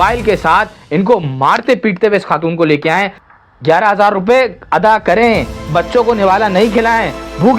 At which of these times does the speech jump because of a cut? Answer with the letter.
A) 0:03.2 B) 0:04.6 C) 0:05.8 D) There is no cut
A